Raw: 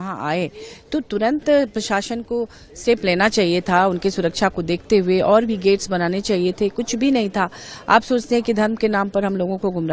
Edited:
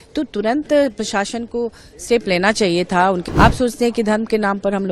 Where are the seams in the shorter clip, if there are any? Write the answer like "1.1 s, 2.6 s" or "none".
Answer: 3.2 s